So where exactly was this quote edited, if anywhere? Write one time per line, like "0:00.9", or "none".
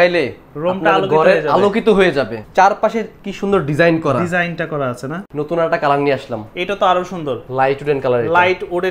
0:02.4
0:05.2
0:07.4